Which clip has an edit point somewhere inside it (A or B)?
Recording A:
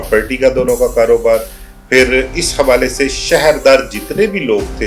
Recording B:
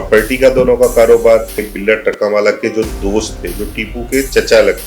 B